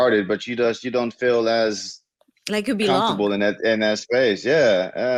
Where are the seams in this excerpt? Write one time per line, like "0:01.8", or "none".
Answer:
none